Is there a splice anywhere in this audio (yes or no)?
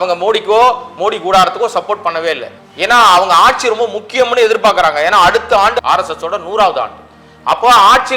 yes